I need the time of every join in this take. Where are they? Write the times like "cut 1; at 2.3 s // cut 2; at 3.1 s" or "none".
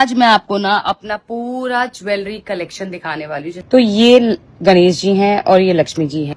cut 1; at 3.6 s